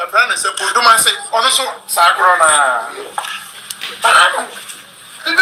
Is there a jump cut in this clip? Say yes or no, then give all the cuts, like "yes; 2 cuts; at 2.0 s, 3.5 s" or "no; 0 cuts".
no; 0 cuts